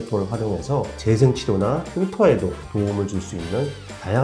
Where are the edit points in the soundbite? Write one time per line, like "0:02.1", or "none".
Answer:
0:00.9
0:01.9